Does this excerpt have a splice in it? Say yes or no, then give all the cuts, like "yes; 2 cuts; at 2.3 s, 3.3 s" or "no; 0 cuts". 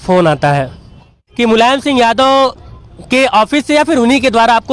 yes; 1 cut; at 1.2 s